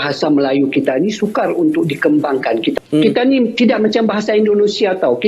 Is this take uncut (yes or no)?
no